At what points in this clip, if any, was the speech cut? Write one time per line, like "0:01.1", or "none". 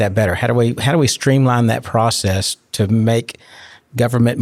none